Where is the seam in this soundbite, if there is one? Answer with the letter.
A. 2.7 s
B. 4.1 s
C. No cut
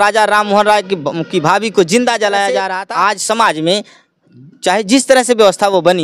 A